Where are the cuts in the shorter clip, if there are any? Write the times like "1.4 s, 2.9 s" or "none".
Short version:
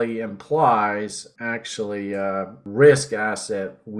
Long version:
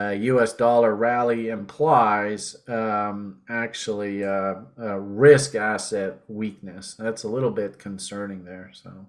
1.3 s, 2.6 s